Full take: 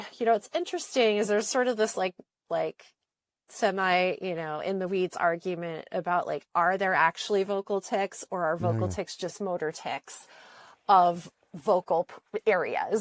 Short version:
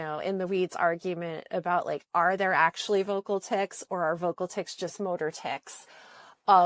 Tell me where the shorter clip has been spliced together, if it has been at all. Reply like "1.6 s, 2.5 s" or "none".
none